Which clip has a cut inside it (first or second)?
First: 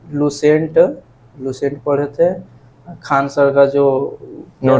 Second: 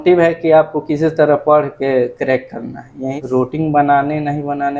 second